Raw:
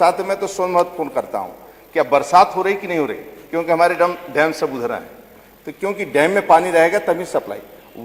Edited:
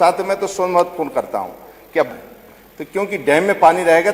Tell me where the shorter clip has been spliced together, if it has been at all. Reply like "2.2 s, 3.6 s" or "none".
2.1 s